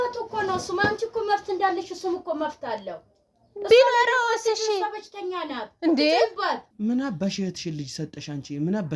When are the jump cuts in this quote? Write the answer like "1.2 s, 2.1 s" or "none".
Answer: 6.7 s